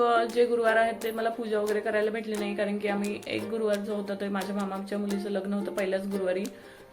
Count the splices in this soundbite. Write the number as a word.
zero